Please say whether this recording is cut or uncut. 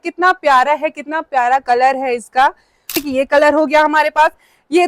cut